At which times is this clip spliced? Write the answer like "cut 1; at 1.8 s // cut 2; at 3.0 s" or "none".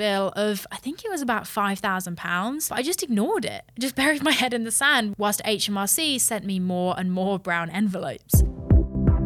cut 1; at 2.7 s // cut 2; at 8.2 s